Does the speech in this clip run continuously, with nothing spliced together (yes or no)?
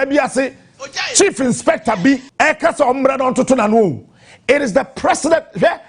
no